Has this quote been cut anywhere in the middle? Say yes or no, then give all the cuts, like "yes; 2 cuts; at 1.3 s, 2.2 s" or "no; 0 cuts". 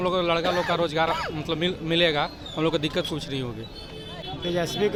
no; 0 cuts